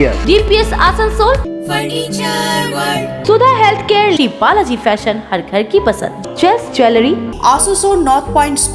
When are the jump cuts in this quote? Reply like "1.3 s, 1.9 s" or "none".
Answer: 1.4 s, 3.2 s, 7.3 s